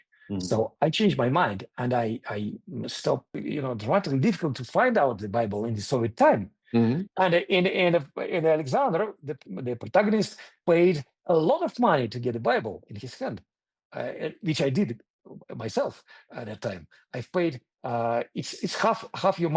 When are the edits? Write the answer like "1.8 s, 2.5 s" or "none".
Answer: 3.3 s